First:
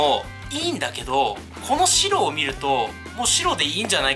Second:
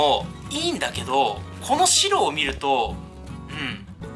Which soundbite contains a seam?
first; 1 cut; at 3.0 s

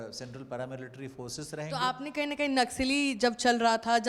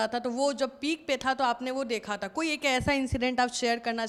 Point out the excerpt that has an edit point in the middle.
first; 1 cut; at 2.0 s

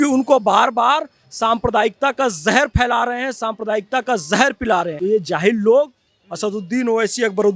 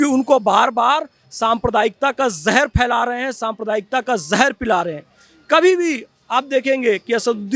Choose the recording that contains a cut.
first; 1 cut; at 4.9 s

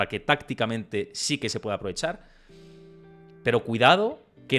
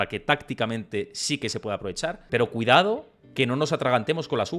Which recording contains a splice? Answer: second; 1 cut; at 2.2 s

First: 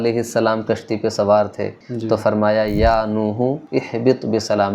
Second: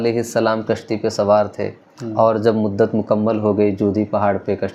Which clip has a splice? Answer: first; 2 cuts; at 1.9 s, 3.6 s

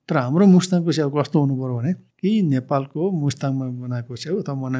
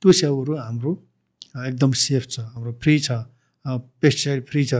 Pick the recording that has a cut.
first; 1 cut; at 2.1 s

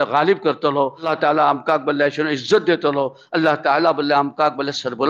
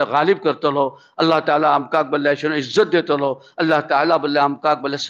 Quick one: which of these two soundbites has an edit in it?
first; 1 cut; at 1.1 s

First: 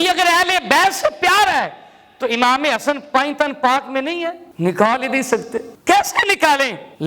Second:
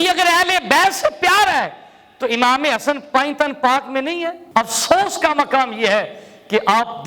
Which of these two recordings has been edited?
second; 1 cut; at 4.4 s

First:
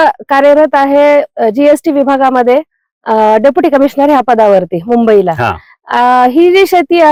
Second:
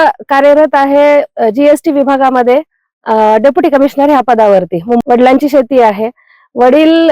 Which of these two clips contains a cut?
second; 1 cut; at 5.0 s

